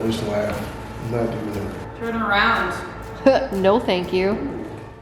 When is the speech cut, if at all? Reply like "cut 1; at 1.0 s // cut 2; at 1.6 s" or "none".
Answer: cut 1; at 1.8 s